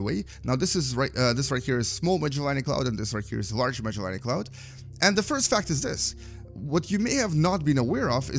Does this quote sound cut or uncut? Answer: uncut